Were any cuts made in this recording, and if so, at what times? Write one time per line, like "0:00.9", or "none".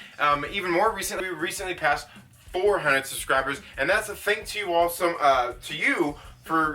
0:01.2

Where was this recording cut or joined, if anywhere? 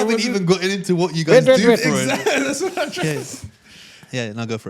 none

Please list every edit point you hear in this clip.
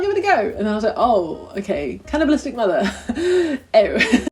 none

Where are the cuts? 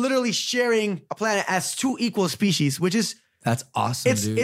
0:01.1

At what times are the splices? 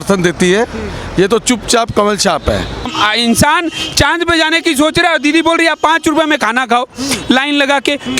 0:02.9

